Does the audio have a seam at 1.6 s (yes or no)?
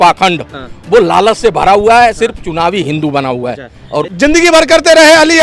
no